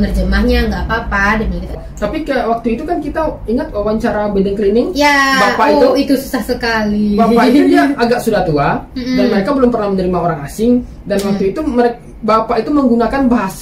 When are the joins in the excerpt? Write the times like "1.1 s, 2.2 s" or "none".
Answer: 1.8 s